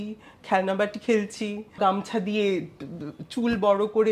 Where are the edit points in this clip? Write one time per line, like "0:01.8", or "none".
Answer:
0:01.8